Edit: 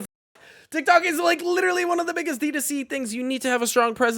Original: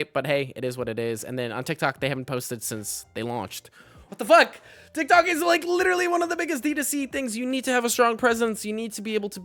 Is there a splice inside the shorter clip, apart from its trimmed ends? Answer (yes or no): no